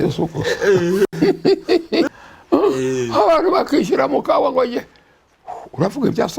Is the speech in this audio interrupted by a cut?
yes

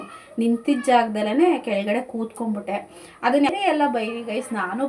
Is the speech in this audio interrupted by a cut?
yes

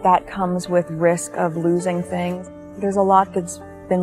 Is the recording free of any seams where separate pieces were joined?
no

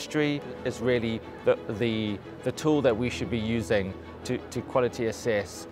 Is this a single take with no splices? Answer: yes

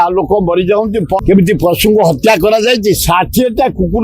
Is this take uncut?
no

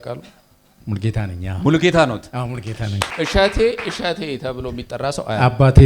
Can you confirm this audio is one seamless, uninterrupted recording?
no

